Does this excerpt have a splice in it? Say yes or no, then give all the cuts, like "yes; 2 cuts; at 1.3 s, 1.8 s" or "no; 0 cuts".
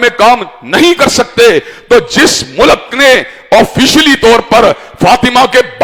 no; 0 cuts